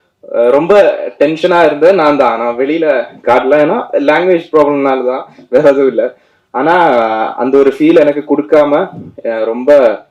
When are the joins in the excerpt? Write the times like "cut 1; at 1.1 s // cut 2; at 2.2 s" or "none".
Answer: none